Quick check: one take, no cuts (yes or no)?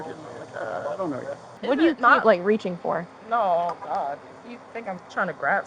no